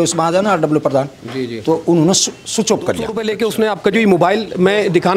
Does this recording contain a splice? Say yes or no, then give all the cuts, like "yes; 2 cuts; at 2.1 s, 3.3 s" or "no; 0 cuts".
yes; 1 cut; at 3.3 s